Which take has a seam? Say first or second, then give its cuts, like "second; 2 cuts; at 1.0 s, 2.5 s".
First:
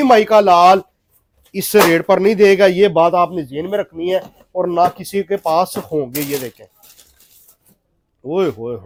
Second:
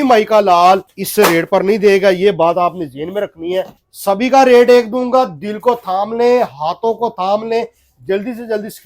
second; 2 cuts; at 1.0 s, 3.8 s